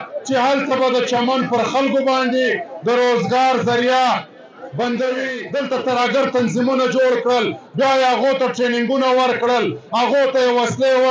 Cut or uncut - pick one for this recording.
cut